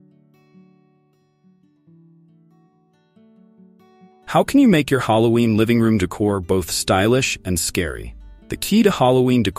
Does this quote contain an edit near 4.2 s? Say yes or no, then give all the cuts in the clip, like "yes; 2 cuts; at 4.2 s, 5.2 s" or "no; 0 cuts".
yes; 1 cut; at 4.2 s